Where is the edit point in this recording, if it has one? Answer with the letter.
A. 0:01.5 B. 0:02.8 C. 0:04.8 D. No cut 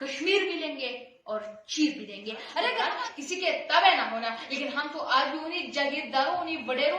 B